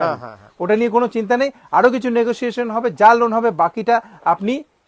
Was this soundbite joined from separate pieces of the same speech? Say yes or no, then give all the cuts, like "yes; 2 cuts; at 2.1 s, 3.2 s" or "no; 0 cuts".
no; 0 cuts